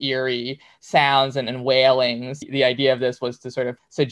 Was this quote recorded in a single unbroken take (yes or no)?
no